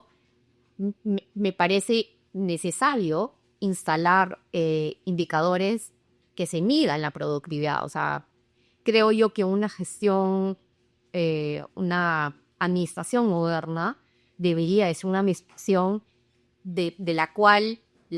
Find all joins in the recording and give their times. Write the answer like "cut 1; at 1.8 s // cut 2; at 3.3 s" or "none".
none